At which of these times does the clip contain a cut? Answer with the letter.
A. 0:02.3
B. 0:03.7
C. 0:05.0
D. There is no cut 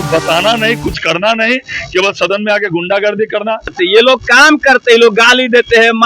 B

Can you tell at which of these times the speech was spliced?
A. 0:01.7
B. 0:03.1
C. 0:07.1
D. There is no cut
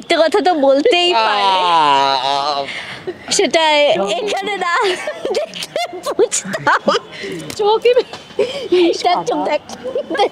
D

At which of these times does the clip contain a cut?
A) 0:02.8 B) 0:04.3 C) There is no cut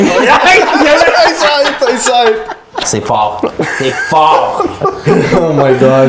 A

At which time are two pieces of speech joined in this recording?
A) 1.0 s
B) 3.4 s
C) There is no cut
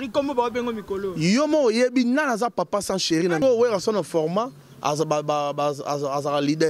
B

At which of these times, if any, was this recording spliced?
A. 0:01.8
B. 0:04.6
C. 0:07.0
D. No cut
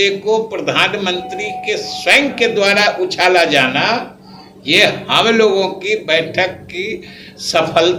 D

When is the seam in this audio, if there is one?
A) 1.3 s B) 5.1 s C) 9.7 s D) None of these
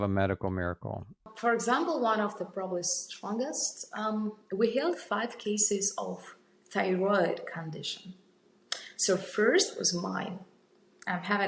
A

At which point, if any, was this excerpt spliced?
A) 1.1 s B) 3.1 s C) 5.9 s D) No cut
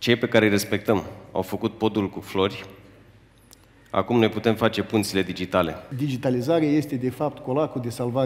C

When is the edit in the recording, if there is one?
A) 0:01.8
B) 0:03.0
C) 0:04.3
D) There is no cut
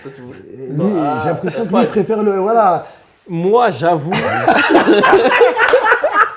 D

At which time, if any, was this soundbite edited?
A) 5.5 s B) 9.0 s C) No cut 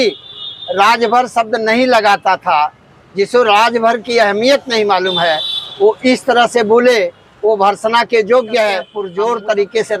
B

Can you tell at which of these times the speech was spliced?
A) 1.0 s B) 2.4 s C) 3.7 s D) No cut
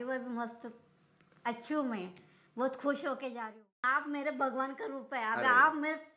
C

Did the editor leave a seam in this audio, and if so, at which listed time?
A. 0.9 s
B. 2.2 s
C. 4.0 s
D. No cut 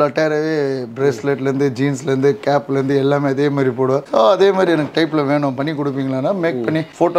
C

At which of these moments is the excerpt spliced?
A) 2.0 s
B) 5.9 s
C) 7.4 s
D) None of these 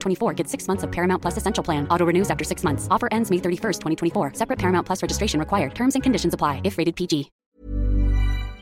C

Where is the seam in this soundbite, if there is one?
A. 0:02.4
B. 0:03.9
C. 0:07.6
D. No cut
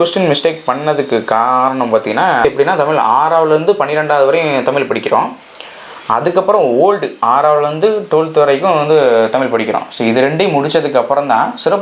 A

